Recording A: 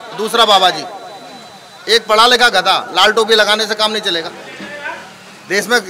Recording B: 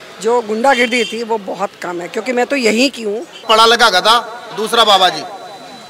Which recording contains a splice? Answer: B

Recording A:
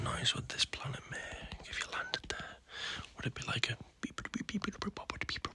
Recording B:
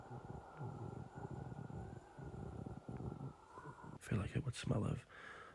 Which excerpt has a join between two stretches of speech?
B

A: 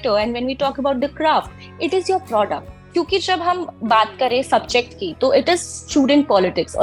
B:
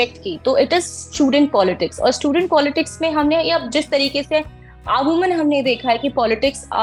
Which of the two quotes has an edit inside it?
A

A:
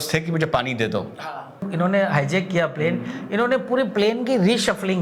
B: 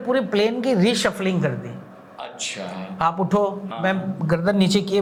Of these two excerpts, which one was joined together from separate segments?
A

